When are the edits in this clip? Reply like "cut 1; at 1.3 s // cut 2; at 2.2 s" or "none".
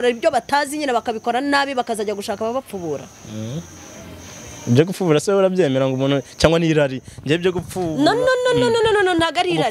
none